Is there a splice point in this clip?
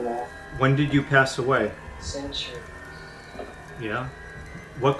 yes; 1 cut; at 1.9 s

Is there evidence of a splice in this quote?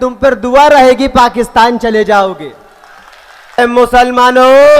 yes; 1 cut; at 3.6 s

